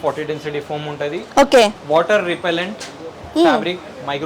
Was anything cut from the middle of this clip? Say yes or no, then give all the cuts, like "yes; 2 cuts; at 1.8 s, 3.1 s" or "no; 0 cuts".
no; 0 cuts